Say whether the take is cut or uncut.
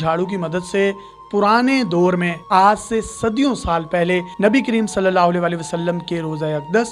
uncut